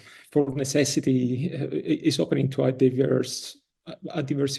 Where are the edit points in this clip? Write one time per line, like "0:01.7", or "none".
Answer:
none

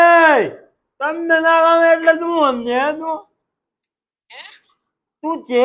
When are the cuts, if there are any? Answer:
0:03.6

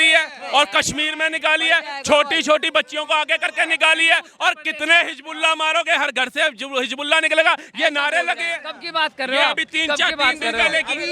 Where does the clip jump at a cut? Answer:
none

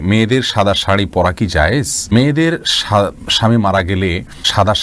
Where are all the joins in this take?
none

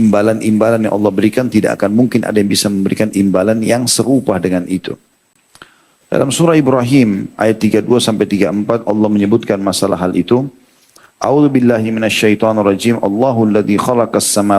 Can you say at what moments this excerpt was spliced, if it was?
none

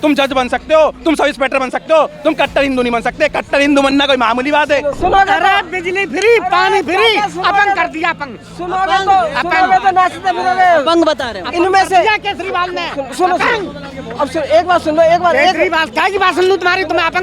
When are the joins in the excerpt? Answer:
0:04.9

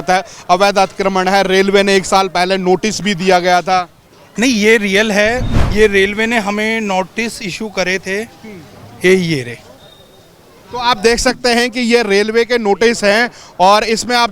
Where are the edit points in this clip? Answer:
0:05.5

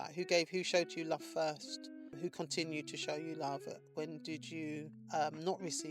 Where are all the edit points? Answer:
0:02.1
0:05.0

